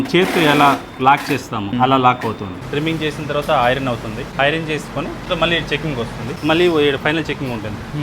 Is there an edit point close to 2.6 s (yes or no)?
yes